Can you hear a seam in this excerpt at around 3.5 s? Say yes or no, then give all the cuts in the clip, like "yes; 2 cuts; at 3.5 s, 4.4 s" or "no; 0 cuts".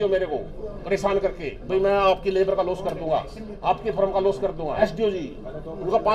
no; 1 cut; at 4.8 s